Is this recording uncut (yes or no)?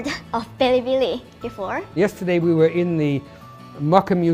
no